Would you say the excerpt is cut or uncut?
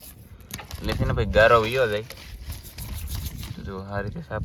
uncut